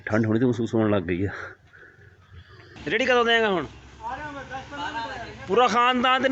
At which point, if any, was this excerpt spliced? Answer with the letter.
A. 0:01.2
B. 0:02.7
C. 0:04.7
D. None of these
B